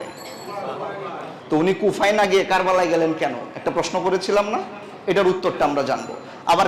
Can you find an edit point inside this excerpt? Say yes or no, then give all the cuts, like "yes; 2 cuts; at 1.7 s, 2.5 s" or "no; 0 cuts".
no; 0 cuts